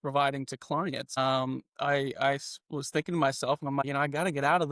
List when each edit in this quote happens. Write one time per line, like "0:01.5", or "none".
0:01.2
0:03.8